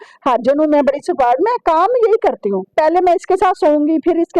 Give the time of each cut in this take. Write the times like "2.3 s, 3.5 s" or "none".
2.7 s